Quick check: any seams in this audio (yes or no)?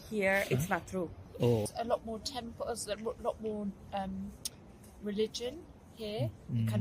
yes